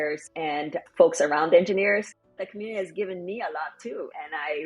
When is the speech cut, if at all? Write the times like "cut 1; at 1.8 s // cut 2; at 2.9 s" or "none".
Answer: cut 1; at 2.5 s